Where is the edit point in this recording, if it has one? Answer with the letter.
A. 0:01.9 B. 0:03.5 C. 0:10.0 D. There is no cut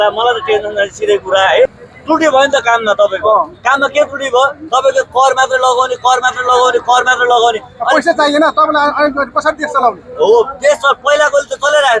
A